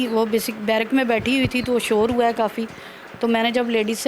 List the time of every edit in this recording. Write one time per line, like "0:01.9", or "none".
none